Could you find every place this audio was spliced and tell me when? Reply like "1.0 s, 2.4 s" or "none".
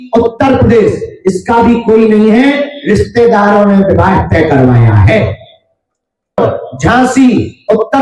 6.4 s

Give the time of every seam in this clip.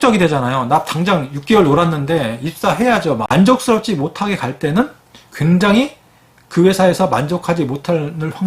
2.6 s

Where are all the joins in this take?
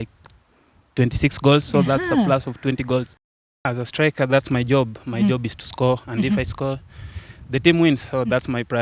3.2 s

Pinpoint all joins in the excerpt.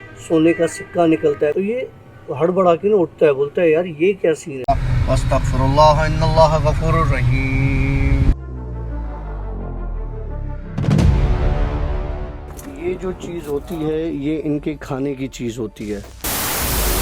1.5 s, 4.5 s

